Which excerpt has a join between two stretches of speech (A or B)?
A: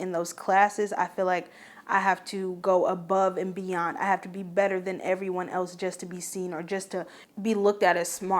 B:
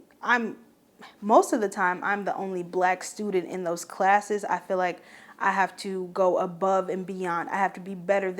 A